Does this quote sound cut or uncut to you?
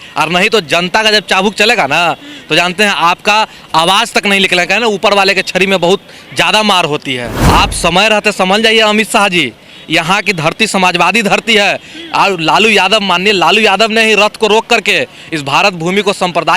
cut